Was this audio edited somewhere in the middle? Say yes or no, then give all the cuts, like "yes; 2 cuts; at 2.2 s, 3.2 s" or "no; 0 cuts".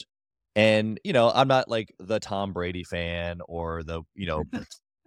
no; 0 cuts